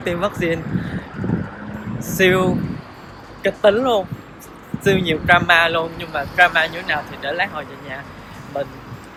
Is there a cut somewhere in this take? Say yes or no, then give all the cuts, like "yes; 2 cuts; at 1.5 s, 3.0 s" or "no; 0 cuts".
no; 0 cuts